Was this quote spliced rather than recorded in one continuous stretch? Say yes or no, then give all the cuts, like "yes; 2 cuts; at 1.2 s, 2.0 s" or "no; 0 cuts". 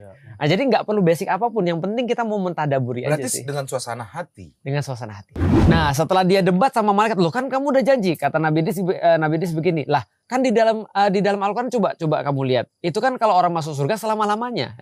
yes; 1 cut; at 5.6 s